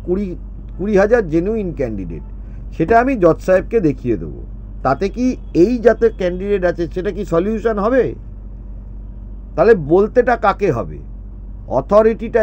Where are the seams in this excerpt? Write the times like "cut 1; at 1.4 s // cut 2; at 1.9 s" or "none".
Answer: none